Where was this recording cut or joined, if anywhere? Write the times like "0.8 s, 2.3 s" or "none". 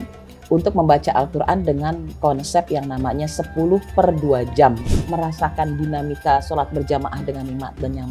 4.9 s